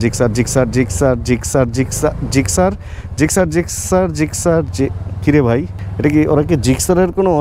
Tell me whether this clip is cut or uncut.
uncut